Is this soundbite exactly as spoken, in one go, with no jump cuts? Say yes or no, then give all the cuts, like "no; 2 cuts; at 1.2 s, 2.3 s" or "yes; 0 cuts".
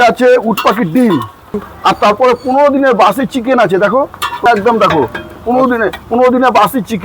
no; 2 cuts; at 1.7 s, 4.4 s